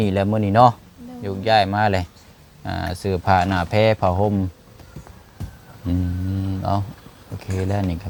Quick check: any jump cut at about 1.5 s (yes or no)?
no